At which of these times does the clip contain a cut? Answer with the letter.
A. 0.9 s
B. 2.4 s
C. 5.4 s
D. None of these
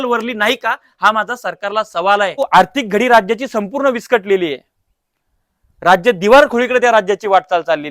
B